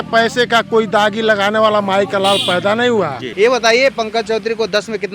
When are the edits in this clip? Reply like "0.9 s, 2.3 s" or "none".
3.2 s